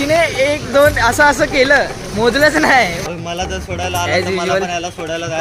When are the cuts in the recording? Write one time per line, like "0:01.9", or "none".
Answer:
0:03.0